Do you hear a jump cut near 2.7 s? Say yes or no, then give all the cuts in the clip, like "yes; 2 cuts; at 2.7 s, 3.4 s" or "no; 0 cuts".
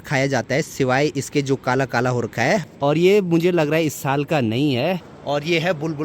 yes; 2 cuts; at 2.7 s, 5.0 s